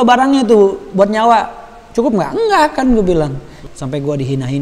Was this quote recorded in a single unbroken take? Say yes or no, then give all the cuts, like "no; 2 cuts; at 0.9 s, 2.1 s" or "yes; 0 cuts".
no; 1 cut; at 3.5 s